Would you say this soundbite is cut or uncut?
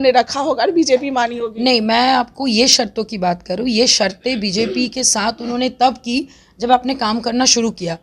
uncut